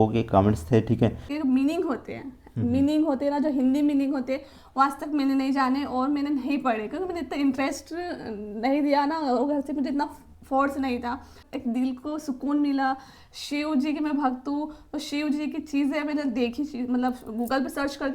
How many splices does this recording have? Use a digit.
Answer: 2